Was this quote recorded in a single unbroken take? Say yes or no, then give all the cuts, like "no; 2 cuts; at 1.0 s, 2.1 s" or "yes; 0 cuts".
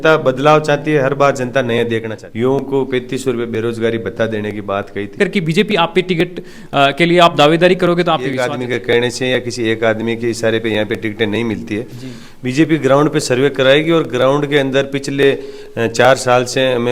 no; 3 cuts; at 2.2 s, 5.2 s, 8.4 s